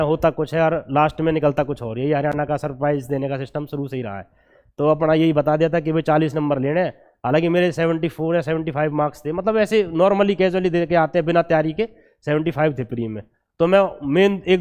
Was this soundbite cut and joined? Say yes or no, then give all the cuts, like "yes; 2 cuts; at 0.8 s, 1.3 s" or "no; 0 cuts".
no; 0 cuts